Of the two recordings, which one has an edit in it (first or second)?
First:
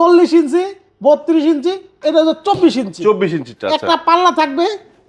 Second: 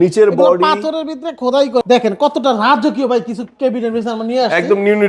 second